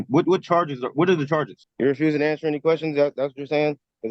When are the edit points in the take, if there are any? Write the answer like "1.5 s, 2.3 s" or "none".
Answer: 1.6 s